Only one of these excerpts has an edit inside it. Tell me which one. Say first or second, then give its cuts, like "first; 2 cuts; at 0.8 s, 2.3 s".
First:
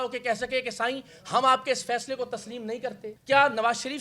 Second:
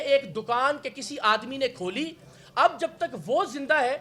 first; 1 cut; at 3.1 s